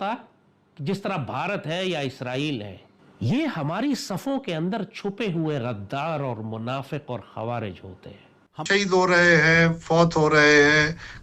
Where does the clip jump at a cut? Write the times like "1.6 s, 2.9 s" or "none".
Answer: 8.7 s